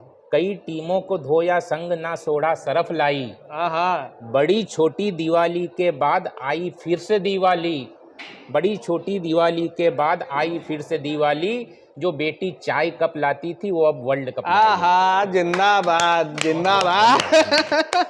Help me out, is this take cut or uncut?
uncut